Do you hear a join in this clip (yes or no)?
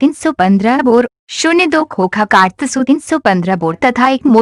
no